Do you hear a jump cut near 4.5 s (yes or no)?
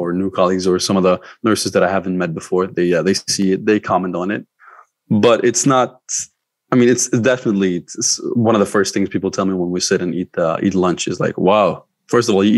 no